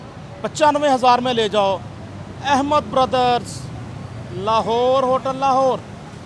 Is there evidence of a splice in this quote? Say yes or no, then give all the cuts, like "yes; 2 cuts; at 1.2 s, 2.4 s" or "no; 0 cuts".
no; 0 cuts